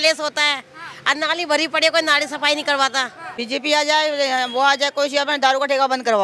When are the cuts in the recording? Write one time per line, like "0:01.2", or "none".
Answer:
0:03.2

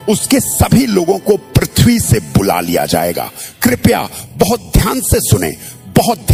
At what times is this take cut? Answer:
none

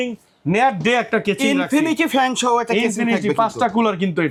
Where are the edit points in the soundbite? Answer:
none

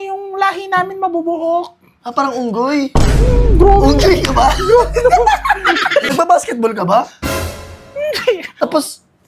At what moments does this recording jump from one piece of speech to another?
0:06.1
0:08.5

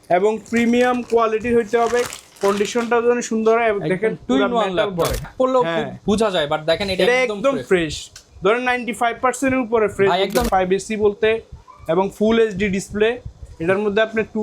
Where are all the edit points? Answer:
0:05.3
0:10.5

